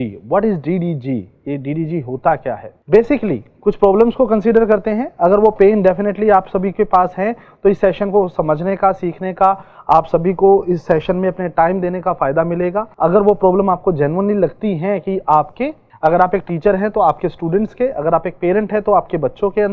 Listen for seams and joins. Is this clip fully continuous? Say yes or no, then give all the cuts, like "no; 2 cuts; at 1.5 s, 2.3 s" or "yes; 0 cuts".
no; 3 cuts; at 2.7 s, 12.9 s, 15.8 s